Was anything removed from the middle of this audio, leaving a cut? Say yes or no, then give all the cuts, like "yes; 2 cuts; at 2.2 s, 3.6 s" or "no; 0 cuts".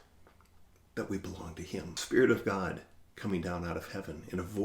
yes; 1 cut; at 2.0 s